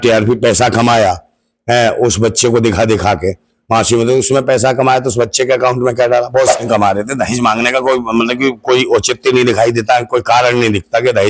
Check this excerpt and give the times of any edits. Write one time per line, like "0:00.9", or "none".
0:06.6